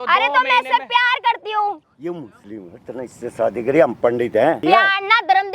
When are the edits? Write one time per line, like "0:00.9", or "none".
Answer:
0:01.8
0:04.6

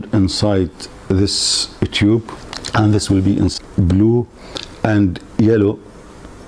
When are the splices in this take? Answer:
0:03.5

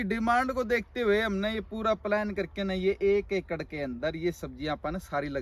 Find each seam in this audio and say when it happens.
none

